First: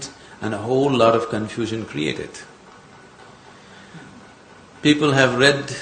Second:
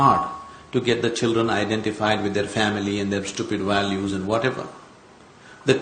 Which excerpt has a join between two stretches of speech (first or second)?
first